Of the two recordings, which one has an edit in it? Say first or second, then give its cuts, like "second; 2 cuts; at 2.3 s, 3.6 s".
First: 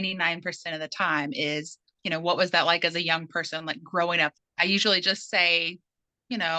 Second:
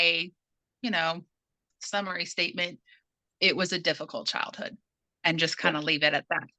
first; 2 cuts; at 1.9 s, 4.3 s